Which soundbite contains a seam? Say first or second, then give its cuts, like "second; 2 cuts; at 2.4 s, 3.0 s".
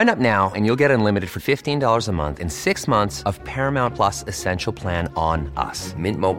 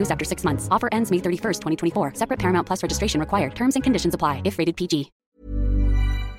second; 1 cut; at 5.2 s